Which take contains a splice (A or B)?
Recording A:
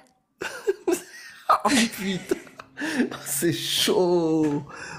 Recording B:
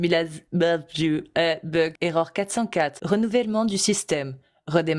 B